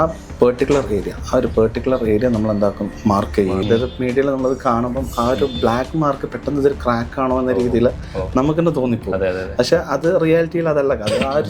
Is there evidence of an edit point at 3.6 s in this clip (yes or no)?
yes